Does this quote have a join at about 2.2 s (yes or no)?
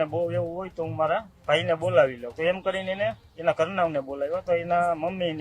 yes